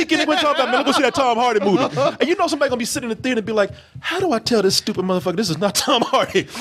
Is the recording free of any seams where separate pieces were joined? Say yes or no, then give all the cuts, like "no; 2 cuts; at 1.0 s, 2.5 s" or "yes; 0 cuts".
yes; 0 cuts